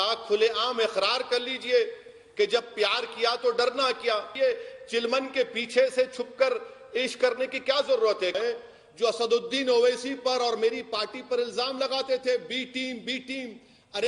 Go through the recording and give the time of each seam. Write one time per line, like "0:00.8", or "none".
0:04.4
0:08.4